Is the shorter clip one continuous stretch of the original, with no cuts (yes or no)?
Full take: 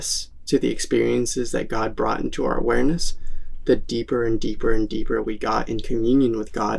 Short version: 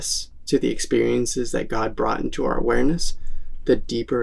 yes